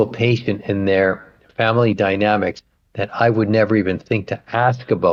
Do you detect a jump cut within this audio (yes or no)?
no